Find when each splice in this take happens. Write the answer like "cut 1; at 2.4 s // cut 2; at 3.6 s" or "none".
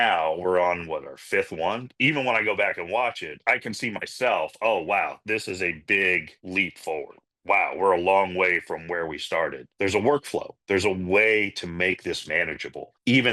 cut 1; at 1.9 s // cut 2; at 3.3 s // cut 3; at 7.2 s // cut 4; at 9.7 s